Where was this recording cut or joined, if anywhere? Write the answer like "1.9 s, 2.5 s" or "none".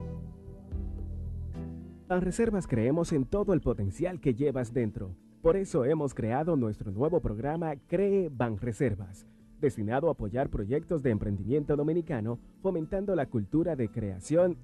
2.0 s